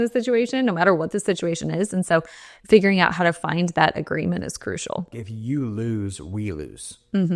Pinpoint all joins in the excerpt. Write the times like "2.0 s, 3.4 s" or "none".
5.3 s